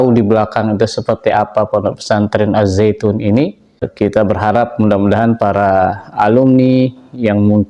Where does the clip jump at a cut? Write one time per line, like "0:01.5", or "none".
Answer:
0:03.9